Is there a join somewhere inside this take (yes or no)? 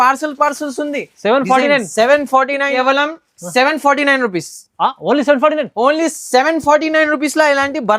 yes